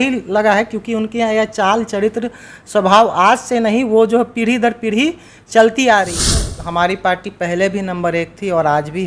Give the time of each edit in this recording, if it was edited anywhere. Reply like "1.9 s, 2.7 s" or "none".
6.4 s